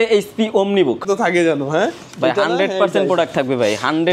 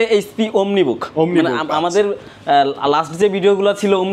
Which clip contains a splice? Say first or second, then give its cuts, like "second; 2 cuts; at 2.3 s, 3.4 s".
first; 1 cut; at 1.0 s